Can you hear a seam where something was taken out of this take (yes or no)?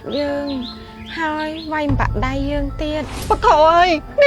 yes